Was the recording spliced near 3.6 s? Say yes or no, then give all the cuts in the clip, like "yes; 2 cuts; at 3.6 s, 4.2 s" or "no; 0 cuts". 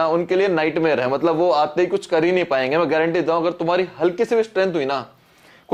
no; 0 cuts